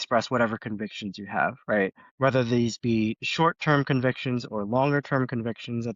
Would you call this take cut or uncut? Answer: cut